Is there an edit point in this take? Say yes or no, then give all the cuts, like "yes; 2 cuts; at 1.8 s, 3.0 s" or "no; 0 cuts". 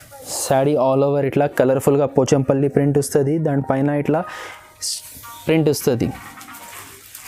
no; 0 cuts